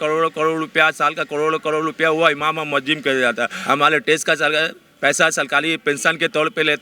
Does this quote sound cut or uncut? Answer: cut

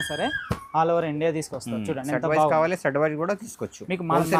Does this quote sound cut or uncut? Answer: uncut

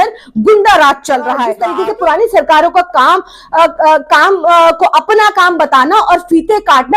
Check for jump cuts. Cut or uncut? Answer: cut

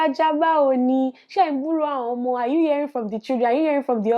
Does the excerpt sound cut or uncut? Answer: uncut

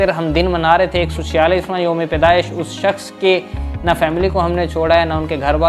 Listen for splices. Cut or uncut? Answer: uncut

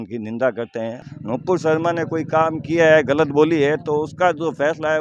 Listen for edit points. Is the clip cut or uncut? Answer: cut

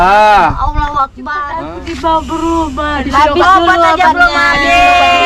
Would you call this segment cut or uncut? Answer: cut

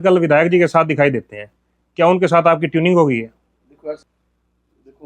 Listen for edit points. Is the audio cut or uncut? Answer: cut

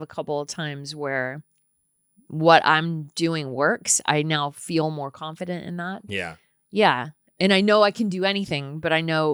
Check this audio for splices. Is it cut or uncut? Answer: uncut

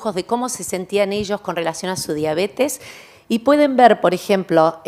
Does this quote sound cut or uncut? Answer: uncut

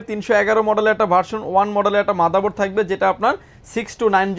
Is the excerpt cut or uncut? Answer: uncut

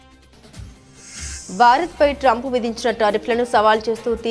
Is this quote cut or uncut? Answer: cut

